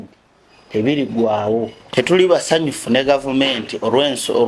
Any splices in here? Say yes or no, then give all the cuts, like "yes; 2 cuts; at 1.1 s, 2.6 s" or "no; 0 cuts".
yes; 1 cut; at 1.8 s